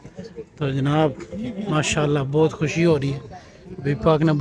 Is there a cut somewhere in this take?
no; 0 cuts

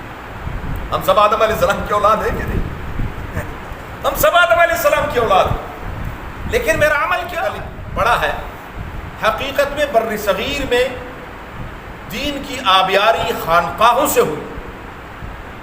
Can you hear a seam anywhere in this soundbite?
yes; 1 cut; at 7.6 s

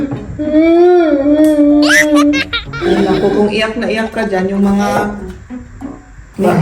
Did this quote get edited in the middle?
yes; 1 cut; at 1.3 s

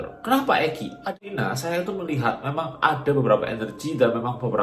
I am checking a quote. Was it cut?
yes; 1 cut; at 1.2 s

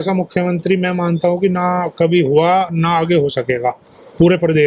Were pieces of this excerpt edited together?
no; 0 cuts

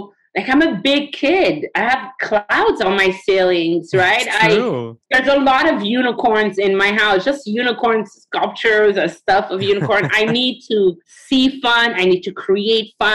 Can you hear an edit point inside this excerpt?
no; 0 cuts

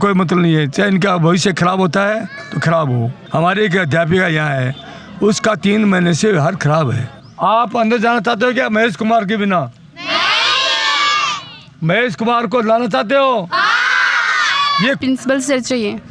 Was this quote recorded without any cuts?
no; 3 cuts; at 3.2 s, 7.2 s, 15.0 s

